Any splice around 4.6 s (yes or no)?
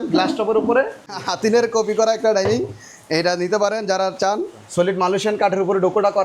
yes